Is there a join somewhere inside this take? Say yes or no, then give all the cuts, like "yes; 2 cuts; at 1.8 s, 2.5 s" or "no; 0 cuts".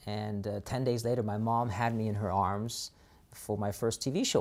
no; 0 cuts